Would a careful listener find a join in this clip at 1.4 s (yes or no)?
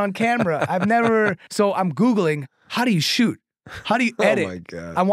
yes